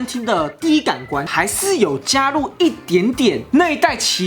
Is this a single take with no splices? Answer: no; 1 cut; at 1.3 s

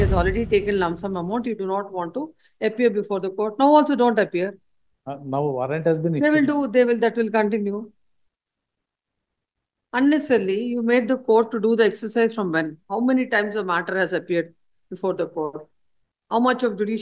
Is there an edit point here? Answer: no; 0 cuts

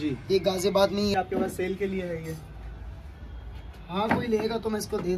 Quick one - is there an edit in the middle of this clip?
yes; 1 cut; at 1.2 s

